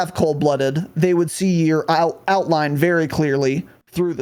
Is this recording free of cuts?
yes; 0 cuts

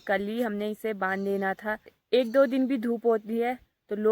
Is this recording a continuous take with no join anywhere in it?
no; 1 cut; at 2.0 s

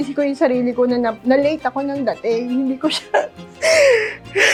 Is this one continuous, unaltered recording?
yes; 0 cuts

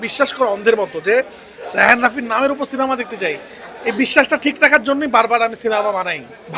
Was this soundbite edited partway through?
no; 0 cuts

